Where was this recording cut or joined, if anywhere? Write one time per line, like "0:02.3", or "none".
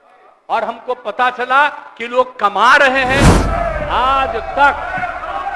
0:03.4

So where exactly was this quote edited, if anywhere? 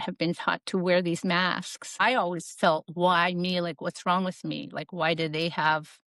0:02.0

